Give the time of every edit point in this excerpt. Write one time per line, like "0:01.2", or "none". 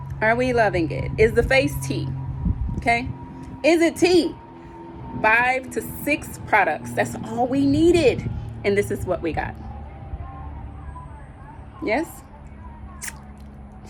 none